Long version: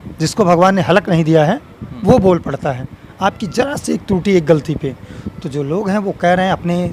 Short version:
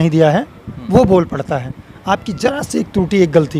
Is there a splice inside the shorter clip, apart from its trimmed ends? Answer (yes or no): no